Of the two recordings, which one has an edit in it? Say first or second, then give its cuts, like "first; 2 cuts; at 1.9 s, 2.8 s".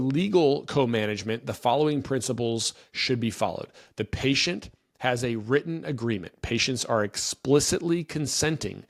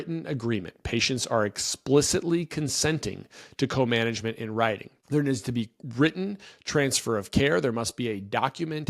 second; 1 cut; at 4.9 s